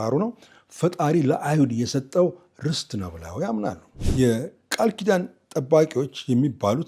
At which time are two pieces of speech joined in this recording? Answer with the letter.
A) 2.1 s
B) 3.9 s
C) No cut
B